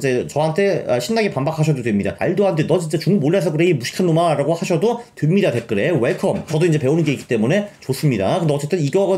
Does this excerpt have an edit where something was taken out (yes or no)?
yes